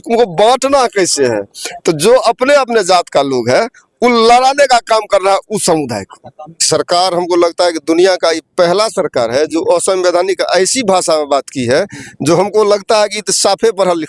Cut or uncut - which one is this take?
cut